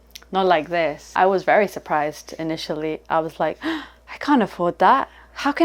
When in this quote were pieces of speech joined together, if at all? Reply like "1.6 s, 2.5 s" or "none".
1.1 s